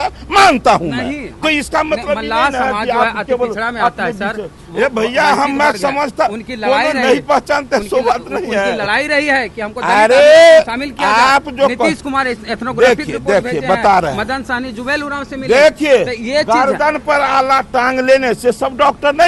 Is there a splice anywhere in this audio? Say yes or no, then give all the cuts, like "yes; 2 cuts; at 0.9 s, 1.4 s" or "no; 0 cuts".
no; 0 cuts